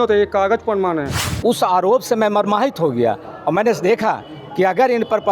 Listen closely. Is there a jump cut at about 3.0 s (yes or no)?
no